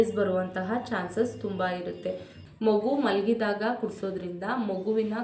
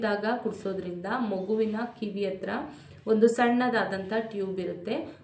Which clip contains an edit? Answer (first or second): first